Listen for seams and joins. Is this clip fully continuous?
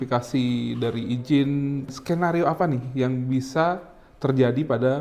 no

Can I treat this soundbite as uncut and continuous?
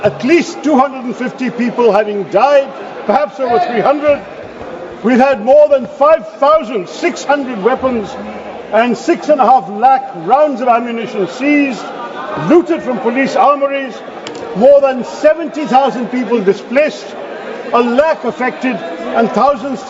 yes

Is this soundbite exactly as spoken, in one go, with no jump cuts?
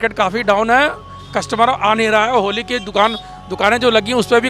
yes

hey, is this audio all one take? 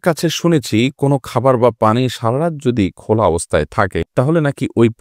yes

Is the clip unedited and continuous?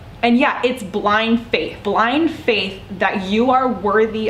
no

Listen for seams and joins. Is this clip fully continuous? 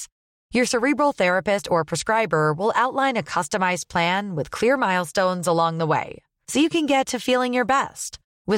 yes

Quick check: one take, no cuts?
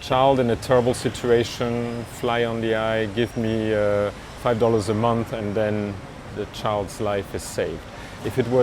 no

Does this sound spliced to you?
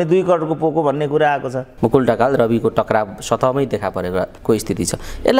yes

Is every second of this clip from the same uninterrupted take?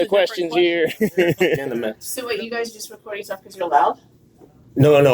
no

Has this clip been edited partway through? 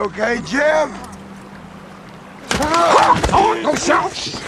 no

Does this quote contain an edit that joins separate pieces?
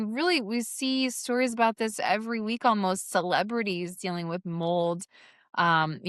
no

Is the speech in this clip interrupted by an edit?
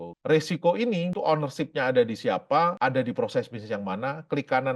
yes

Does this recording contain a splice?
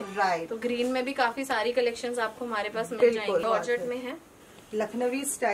yes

